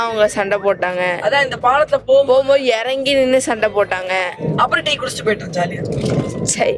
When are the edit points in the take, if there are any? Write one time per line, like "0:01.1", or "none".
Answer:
0:04.4